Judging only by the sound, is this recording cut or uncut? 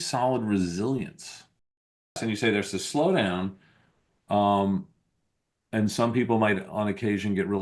cut